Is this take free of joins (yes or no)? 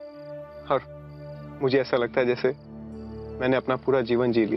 yes